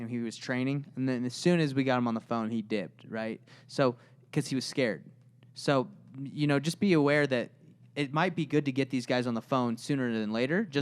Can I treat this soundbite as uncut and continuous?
yes; 0 cuts

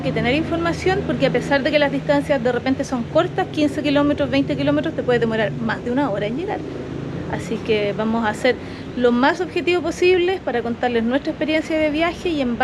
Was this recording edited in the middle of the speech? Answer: no; 0 cuts

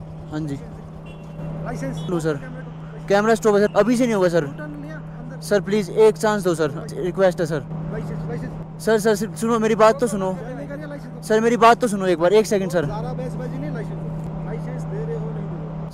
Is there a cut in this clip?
no; 0 cuts

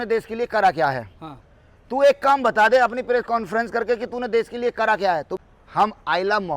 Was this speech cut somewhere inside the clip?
yes; 1 cut; at 5.3 s

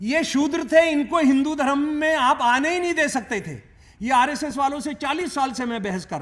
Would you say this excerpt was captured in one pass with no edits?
yes; 0 cuts

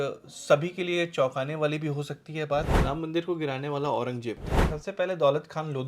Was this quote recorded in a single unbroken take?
no; 2 cuts; at 2.7 s, 4.7 s

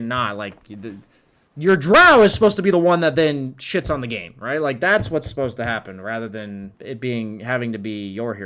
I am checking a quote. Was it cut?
yes; 1 cut; at 6.7 s

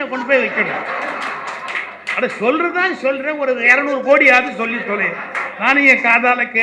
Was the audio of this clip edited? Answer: no; 0 cuts

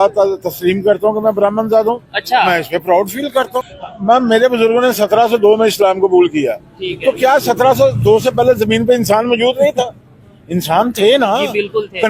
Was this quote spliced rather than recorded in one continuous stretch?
yes; 1 cut; at 3.6 s

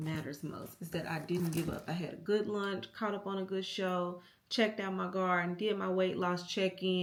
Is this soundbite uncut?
yes; 0 cuts

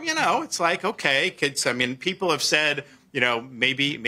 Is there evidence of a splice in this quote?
no; 0 cuts

